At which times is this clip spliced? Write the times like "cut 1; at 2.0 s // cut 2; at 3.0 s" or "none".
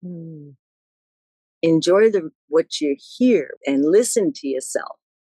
cut 1; at 3.5 s